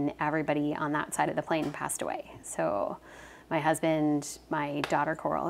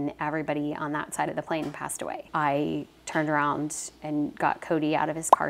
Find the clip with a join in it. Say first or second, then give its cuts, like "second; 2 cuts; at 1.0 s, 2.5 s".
second; 2 cuts; at 2.2 s, 3.0 s